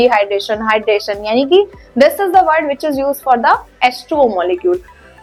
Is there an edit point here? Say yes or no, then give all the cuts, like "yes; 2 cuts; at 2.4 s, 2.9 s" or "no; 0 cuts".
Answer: no; 0 cuts